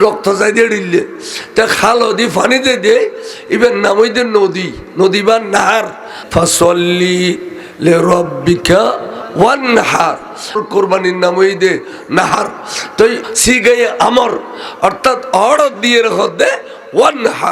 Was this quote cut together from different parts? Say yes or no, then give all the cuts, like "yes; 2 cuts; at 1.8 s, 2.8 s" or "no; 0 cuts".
yes; 1 cut; at 10.5 s